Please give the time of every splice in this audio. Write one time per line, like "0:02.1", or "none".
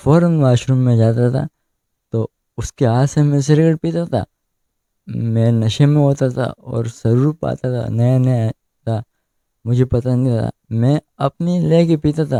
none